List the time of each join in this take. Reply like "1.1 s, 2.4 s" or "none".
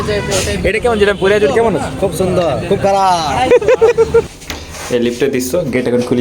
4.2 s